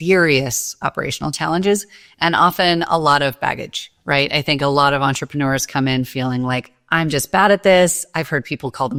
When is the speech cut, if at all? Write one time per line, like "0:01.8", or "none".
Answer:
none

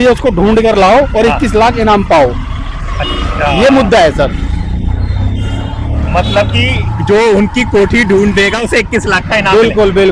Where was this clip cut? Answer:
none

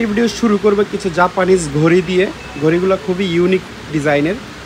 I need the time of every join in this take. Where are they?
none

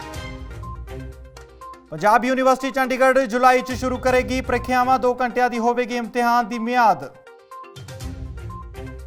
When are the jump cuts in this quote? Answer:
none

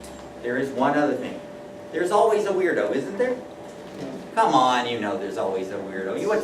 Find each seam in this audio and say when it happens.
0:02.0

